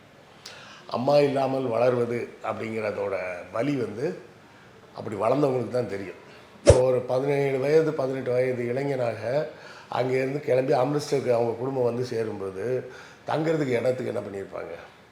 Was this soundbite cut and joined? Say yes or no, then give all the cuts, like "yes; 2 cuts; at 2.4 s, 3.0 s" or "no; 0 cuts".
yes; 1 cut; at 6.7 s